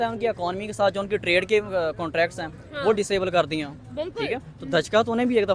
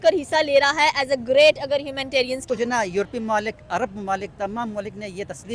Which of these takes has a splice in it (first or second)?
second